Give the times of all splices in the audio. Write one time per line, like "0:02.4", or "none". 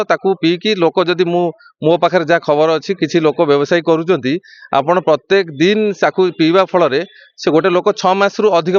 none